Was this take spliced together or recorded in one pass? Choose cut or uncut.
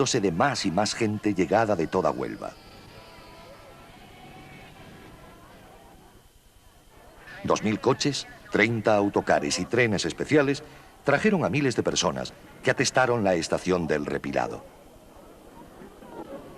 cut